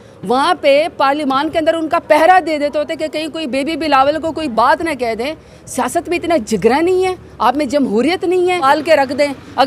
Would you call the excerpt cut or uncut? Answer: cut